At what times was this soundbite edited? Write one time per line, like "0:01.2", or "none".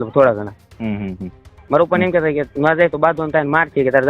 0:01.6